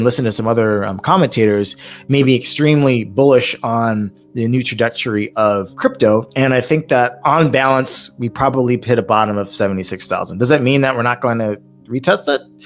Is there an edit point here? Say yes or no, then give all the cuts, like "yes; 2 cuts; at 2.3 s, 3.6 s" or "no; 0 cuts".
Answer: yes; 2 cuts; at 5.7 s, 6.3 s